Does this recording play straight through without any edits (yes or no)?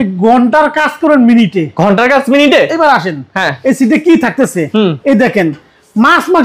yes